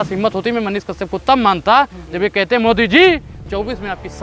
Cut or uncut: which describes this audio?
uncut